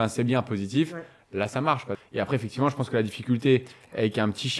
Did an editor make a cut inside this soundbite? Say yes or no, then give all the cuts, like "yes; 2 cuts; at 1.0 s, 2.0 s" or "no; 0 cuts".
yes; 1 cut; at 1.9 s